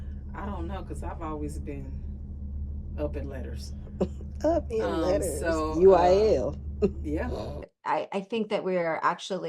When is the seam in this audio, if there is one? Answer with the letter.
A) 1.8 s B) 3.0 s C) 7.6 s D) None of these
C